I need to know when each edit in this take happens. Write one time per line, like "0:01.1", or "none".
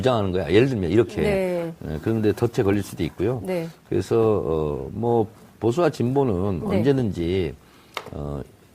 0:02.0

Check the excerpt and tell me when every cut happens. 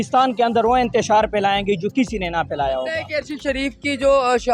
0:03.1

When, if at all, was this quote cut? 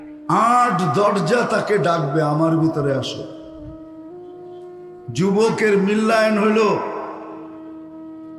0:03.5
0:04.9

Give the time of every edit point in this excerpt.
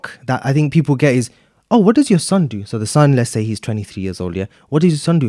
none

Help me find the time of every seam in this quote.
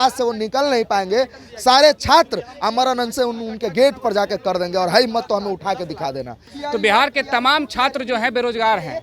0:06.4

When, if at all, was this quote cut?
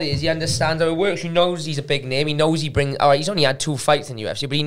none

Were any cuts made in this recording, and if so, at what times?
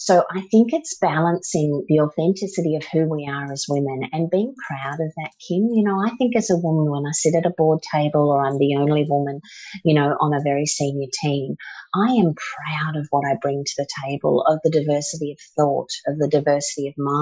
none

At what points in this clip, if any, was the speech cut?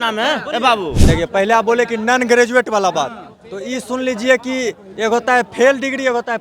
0:01.0

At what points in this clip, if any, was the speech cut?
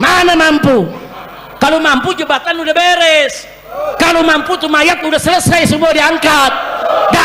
none

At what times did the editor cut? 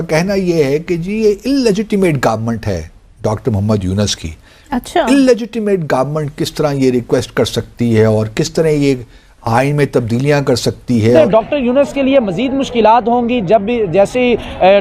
0:11.2

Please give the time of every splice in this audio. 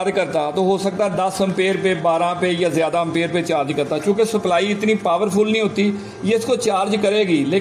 none

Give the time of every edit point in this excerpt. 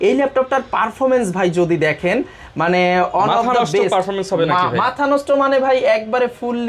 none

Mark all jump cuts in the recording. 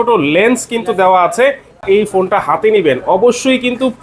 0:01.8

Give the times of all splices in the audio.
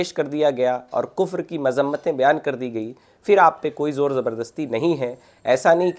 none

